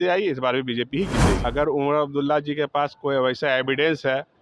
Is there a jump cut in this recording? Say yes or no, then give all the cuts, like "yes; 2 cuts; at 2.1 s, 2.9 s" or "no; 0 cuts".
yes; 1 cut; at 1.4 s